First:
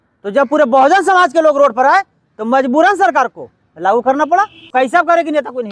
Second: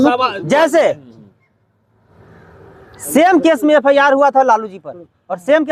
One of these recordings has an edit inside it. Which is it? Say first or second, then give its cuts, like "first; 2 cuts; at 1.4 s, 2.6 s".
first; 1 cut; at 4.7 s